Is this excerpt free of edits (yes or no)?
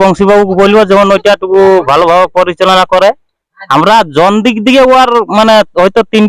yes